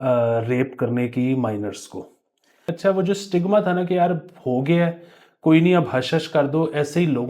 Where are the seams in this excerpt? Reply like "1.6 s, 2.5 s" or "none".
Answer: 2.7 s